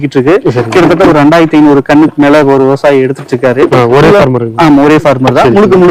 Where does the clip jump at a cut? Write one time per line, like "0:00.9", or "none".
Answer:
none